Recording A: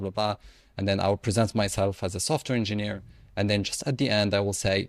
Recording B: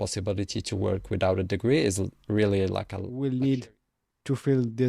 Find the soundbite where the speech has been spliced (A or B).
B